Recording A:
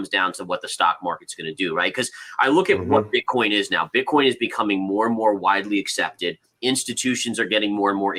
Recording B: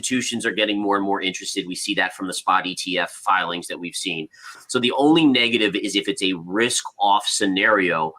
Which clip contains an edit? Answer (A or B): B